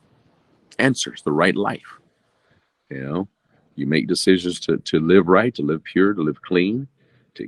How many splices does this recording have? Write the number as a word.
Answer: zero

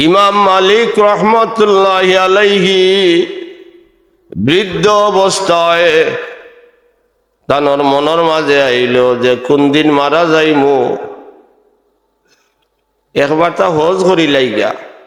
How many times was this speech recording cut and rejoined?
zero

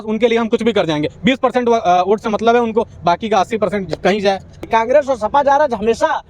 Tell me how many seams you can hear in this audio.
one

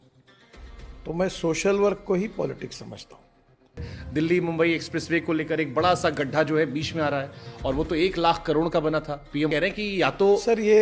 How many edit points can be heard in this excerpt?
two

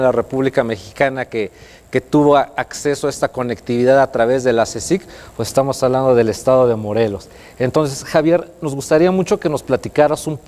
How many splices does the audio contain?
one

